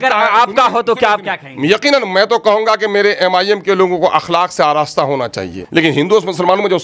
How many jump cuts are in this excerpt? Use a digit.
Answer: 1